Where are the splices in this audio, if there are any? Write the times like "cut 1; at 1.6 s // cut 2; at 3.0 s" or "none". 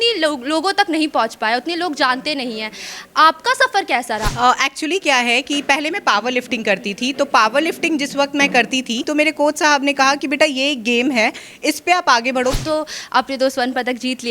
cut 1; at 4.3 s // cut 2; at 9.1 s // cut 3; at 12.6 s